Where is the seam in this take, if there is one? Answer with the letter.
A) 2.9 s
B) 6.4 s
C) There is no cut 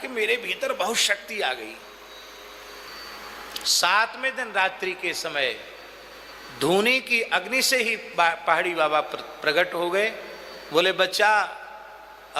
A